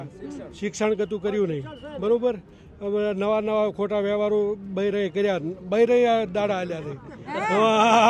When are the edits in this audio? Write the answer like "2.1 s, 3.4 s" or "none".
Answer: none

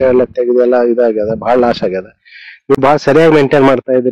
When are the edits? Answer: none

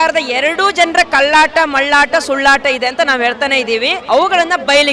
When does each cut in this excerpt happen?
4.0 s

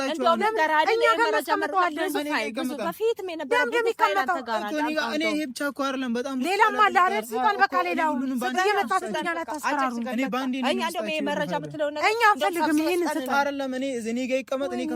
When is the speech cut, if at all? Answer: none

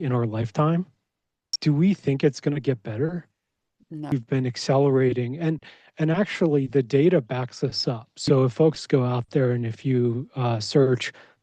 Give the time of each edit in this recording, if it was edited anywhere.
1.5 s, 4.1 s

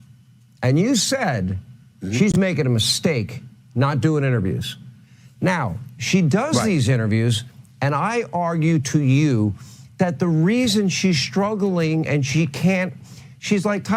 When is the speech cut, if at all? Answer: none

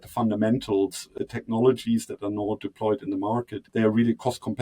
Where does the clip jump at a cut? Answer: 1.0 s, 3.7 s

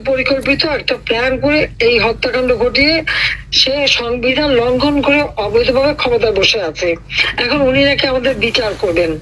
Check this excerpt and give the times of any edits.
none

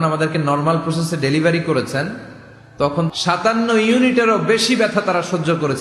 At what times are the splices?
3.1 s

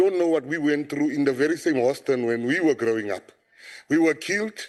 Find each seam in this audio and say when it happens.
none

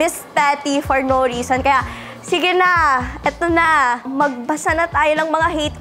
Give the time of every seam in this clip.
4.1 s

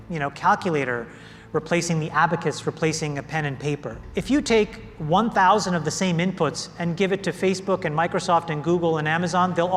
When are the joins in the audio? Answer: 4.0 s

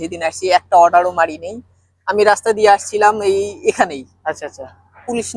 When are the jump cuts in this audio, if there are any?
none

